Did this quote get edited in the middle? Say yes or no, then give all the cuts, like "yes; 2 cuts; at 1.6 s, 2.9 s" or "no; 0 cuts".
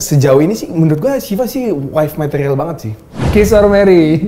yes; 1 cut; at 3.2 s